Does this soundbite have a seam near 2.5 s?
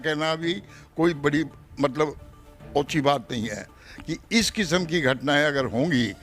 no; 1 cut; at 3.8 s

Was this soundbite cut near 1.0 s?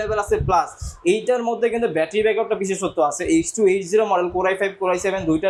no; 0 cuts

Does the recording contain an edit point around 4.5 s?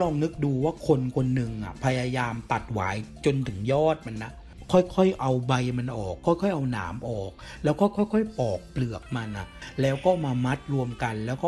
yes; 1 cut; at 4.5 s

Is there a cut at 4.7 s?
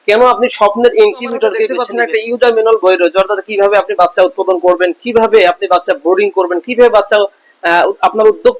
no; 1 cut; at 1.7 s

